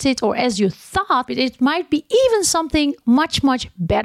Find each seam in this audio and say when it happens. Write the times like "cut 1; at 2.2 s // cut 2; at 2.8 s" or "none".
cut 1; at 1.3 s